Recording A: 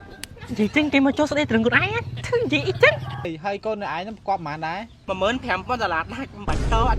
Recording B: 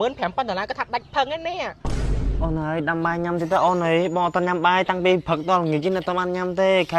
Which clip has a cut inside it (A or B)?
A